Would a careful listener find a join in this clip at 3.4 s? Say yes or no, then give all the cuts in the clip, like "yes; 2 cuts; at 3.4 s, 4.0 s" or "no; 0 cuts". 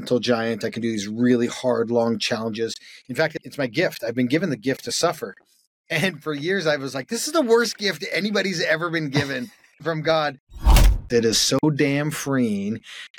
yes; 2 cuts; at 3.4 s, 10.8 s